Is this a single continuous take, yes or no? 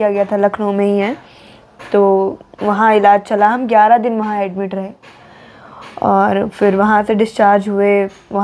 yes